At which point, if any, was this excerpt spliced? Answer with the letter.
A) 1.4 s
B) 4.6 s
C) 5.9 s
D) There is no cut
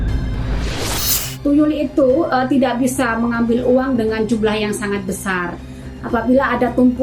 A